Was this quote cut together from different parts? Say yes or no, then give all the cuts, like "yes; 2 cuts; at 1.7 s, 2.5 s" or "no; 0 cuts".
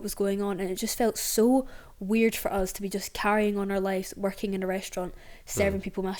no; 0 cuts